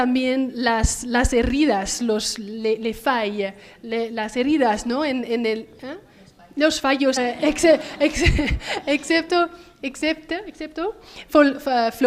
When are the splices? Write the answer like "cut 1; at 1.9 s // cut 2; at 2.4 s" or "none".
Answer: none